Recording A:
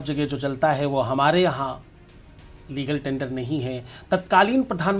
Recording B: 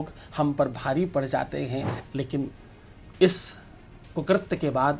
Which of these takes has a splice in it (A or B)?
B